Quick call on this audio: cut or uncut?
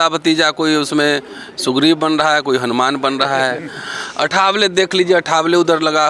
uncut